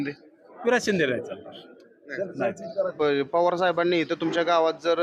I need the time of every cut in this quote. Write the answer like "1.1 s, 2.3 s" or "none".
2.9 s

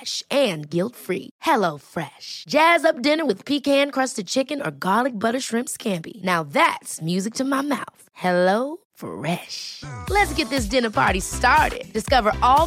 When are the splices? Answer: none

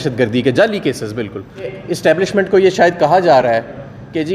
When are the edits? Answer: 1.8 s

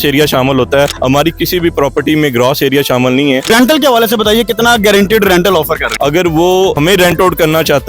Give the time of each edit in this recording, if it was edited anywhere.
3.5 s, 5.9 s

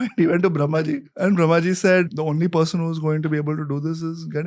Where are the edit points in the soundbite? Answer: 1.1 s, 2.1 s

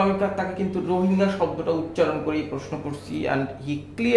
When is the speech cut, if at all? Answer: none

